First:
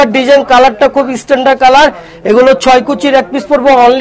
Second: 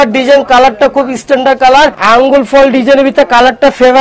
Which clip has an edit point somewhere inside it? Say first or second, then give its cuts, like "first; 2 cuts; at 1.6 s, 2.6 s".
second; 1 cut; at 2.0 s